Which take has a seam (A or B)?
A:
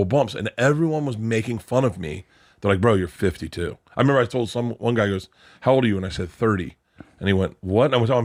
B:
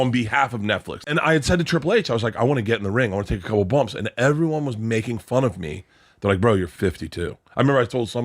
B